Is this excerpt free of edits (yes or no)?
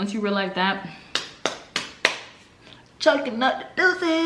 yes